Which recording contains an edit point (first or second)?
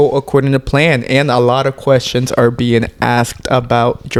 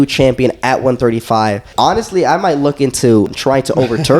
second